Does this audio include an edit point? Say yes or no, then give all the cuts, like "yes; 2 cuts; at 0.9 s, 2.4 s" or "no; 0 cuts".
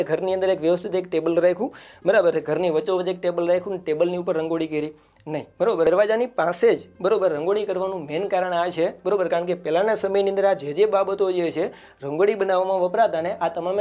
no; 0 cuts